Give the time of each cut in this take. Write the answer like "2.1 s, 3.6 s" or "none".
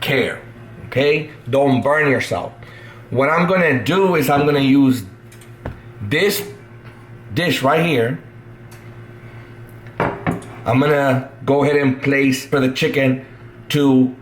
12.5 s